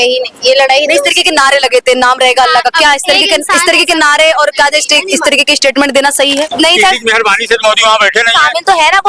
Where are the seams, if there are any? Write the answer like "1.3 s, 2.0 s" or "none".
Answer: 6.5 s